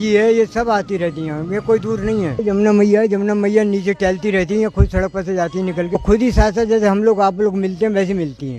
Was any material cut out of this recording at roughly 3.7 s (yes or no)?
no